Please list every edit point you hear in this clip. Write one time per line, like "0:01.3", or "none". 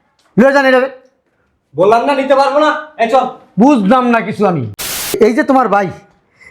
0:05.1